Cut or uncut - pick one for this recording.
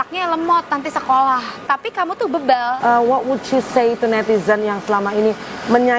cut